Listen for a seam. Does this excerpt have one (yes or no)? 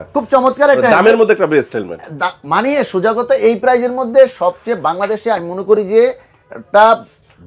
no